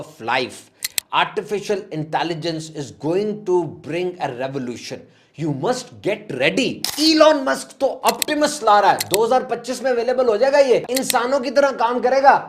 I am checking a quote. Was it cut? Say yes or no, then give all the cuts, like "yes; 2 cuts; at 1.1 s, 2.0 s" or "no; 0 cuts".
yes; 2 cuts; at 6.9 s, 10.9 s